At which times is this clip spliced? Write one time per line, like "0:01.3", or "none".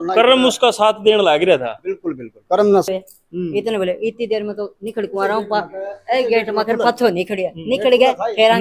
0:02.9